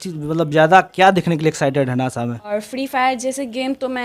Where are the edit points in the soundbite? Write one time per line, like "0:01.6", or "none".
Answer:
0:02.5

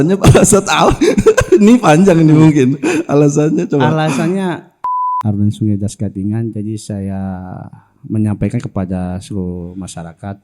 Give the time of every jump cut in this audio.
0:05.0

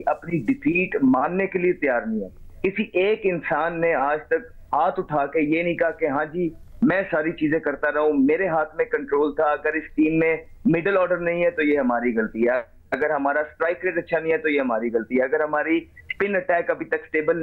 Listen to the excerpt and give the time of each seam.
none

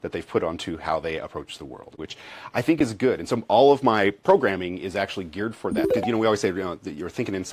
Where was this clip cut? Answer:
0:01.9
0:05.9

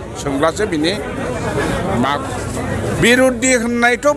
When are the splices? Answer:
0:02.4

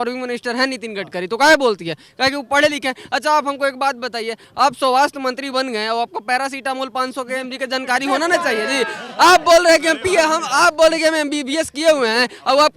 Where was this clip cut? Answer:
none

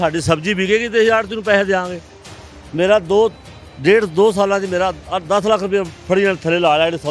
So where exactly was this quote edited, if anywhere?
none

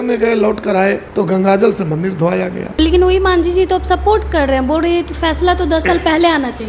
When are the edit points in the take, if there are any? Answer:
0:01.0
0:02.8

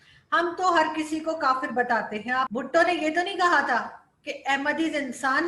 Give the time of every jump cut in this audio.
0:02.5

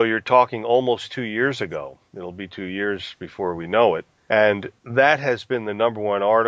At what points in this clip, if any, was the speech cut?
0:03.3

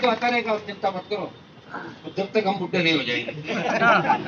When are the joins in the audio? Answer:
none

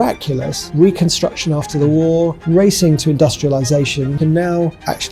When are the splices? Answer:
0:04.2

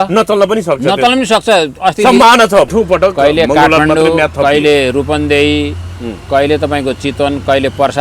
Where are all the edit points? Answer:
0:02.7

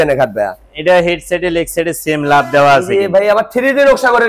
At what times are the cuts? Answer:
none

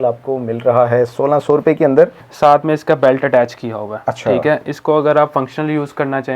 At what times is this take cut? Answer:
0:02.2

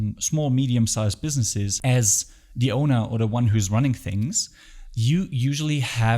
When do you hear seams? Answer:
0:01.7

